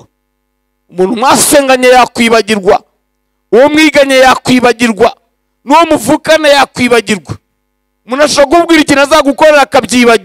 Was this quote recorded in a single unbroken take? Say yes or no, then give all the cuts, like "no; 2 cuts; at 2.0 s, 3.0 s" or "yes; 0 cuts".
yes; 0 cuts